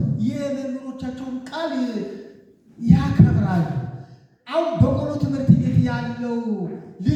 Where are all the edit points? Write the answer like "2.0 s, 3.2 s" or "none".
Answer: none